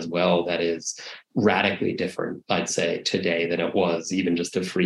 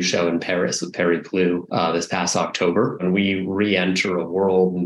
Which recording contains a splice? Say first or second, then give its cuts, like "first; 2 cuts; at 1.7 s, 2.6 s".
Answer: second; 1 cut; at 3.0 s